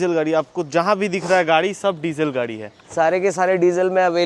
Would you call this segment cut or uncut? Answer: uncut